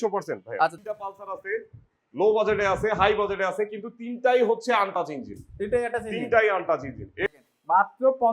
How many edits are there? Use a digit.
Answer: 2